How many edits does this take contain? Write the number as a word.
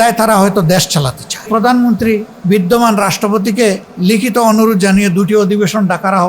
two